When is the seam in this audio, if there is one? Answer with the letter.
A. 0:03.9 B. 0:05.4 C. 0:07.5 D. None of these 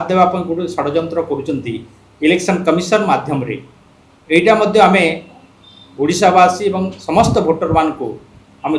D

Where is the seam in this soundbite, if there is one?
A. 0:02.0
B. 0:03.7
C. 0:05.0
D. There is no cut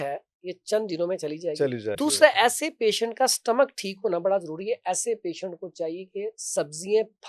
A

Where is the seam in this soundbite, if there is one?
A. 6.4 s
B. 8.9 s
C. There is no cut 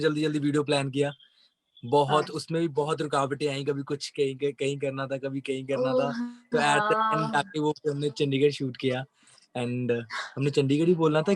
C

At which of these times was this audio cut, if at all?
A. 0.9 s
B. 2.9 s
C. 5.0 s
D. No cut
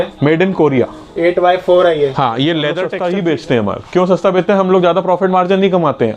B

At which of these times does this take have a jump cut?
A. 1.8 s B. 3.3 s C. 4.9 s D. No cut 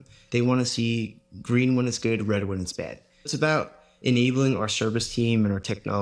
B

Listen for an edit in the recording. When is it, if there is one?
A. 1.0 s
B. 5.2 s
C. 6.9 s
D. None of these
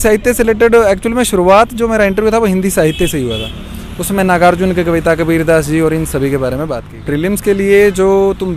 C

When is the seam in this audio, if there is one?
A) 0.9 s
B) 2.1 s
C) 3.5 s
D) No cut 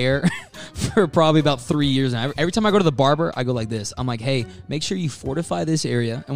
B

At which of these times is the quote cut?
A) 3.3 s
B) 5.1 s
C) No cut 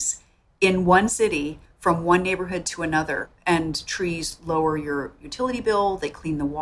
A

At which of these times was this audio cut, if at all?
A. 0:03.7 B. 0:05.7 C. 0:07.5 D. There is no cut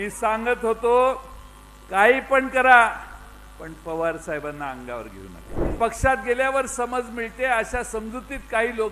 B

